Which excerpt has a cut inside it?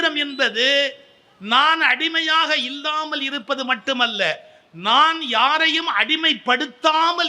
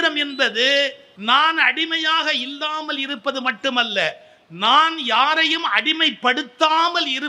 second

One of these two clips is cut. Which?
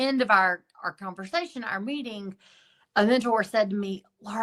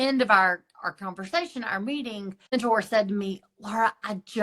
second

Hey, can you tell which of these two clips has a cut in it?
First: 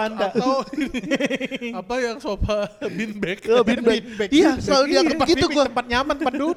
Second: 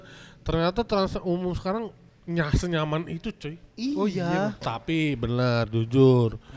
second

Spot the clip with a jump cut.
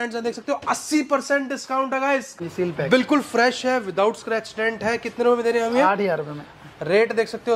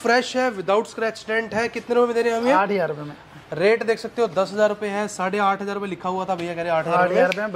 first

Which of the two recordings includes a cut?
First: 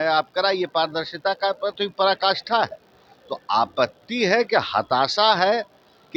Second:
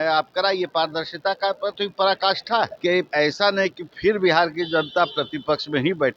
second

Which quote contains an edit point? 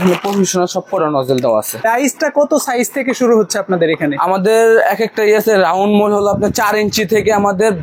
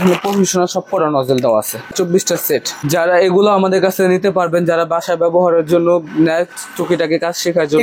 first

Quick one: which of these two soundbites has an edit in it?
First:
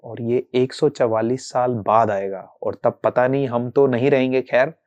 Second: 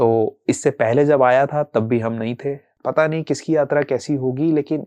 second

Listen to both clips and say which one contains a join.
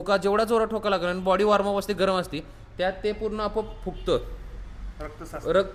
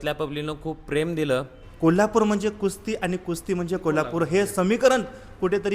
second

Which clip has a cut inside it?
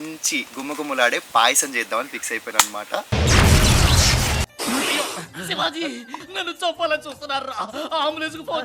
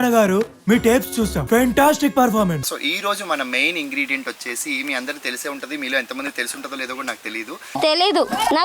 second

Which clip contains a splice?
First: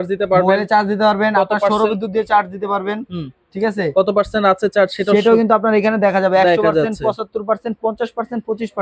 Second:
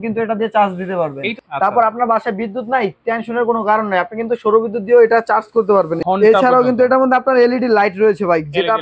second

